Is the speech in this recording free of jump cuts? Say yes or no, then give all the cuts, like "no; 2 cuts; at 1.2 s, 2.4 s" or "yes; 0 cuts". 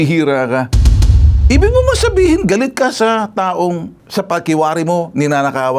no; 1 cut; at 1.1 s